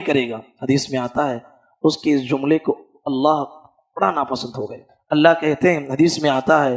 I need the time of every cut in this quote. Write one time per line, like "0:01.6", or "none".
0:04.9